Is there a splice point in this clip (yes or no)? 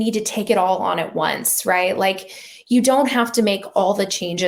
no